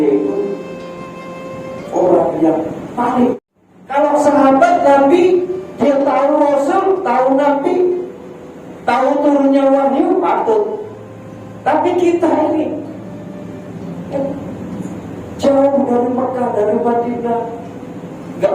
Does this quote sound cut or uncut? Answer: cut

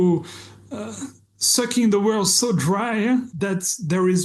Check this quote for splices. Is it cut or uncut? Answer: cut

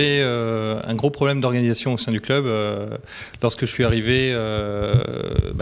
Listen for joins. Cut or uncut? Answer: cut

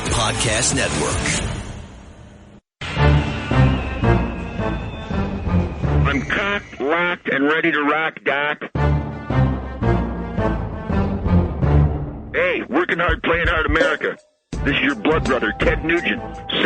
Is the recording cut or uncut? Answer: cut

